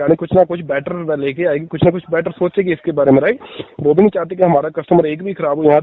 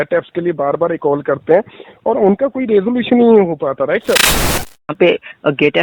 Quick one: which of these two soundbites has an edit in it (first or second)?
second